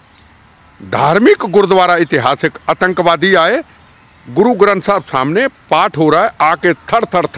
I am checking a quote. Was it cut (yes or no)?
no